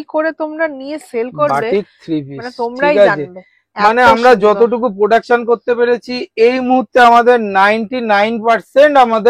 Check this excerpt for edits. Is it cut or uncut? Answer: uncut